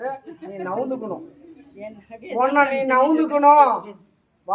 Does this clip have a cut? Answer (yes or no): no